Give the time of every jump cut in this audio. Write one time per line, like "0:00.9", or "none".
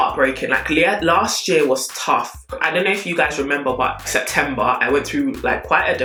none